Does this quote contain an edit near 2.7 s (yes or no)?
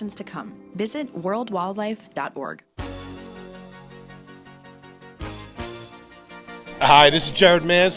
yes